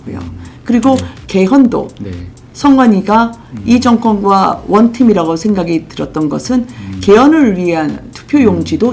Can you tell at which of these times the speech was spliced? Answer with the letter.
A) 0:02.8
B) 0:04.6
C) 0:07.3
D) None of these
D